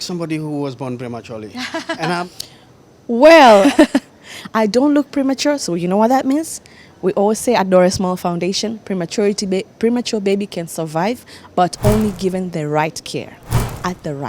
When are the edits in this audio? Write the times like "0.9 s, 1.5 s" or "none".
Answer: 2.2 s, 3.7 s